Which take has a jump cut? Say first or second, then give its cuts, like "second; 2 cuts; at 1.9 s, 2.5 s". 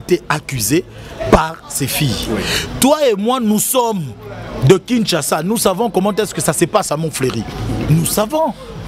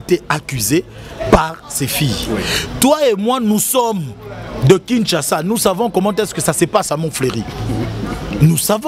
first; 1 cut; at 7.8 s